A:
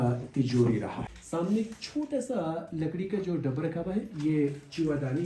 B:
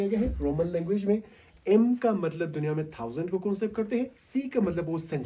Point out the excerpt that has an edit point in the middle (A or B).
A